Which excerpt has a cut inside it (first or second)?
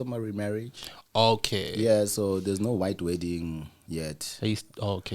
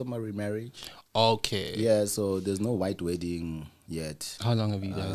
second